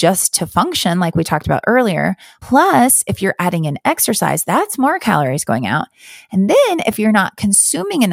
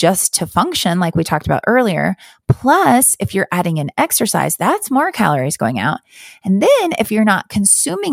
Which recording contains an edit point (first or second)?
first